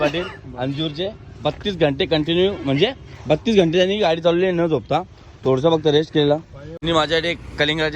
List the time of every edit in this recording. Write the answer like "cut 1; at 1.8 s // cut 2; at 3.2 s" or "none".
cut 1; at 6.8 s